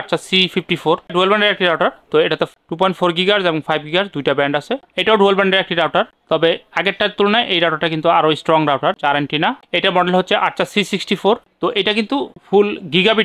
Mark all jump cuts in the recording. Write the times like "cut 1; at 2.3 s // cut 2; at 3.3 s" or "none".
cut 1; at 1.1 s // cut 2; at 4.9 s // cut 3; at 9.5 s // cut 4; at 11.5 s